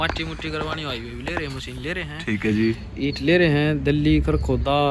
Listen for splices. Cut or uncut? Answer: uncut